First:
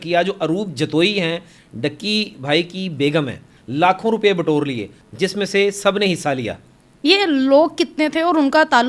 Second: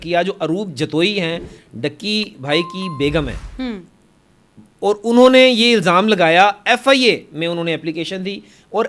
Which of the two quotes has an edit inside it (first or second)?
first